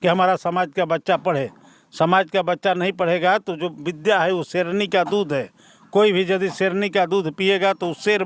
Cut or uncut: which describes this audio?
uncut